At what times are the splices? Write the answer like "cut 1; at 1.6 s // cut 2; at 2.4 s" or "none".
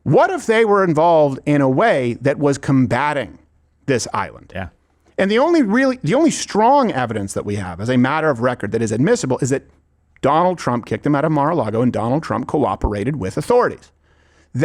none